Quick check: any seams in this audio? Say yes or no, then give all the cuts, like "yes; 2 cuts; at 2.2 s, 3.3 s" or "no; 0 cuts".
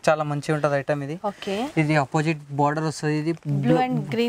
no; 0 cuts